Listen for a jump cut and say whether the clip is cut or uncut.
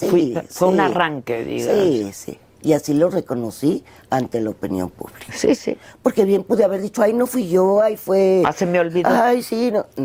uncut